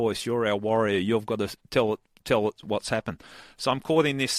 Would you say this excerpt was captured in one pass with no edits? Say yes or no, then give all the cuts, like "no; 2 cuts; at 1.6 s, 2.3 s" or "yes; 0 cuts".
yes; 0 cuts